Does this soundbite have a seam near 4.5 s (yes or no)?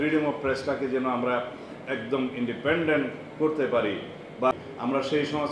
yes